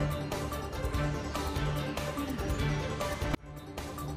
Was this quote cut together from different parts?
no; 0 cuts

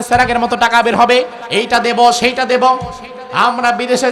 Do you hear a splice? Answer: yes; 1 cut; at 1.4 s

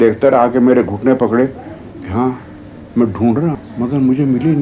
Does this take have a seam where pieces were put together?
yes; 1 cut; at 3.6 s

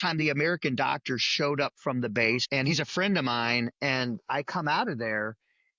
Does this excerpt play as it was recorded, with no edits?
no; 1 cut; at 2.4 s

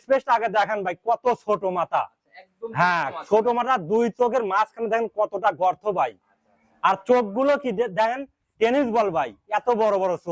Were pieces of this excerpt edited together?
no; 0 cuts

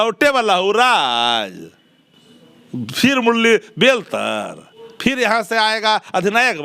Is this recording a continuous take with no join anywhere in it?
yes; 0 cuts

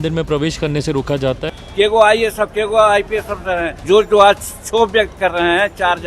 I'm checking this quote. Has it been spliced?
yes; 2 cuts; at 1.6 s, 3.8 s

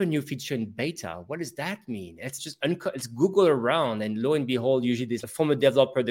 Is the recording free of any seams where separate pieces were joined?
no; 2 cuts; at 2.4 s, 5.2 s

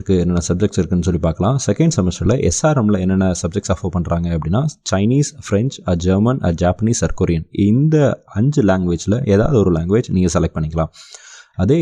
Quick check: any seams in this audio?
no; 0 cuts

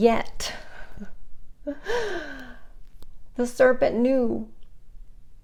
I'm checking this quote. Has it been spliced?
no; 0 cuts

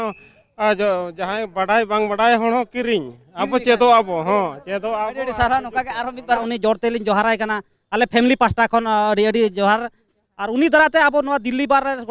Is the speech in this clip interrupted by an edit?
yes; 1 cut; at 6.4 s

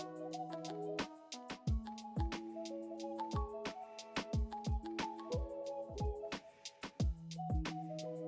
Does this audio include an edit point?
no; 0 cuts

